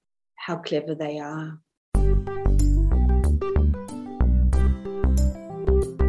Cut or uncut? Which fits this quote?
cut